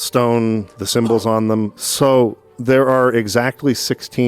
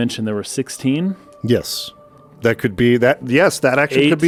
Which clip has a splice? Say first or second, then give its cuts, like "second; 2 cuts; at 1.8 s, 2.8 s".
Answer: first; 1 cut; at 1.7 s